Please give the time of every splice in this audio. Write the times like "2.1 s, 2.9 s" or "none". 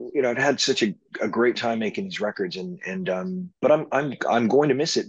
none